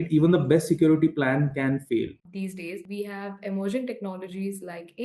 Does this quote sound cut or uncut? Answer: cut